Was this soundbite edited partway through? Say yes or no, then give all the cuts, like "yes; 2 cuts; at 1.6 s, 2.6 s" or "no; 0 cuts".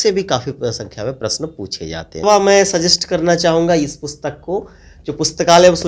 yes; 1 cut; at 2.2 s